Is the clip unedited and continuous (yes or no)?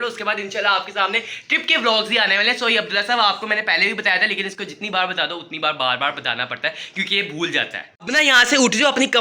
yes